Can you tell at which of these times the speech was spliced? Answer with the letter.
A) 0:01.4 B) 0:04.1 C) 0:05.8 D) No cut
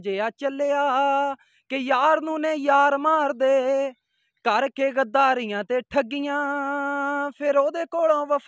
D